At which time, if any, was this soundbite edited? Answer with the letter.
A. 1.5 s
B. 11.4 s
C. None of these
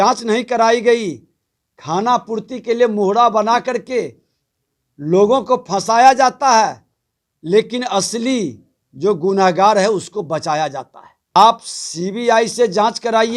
B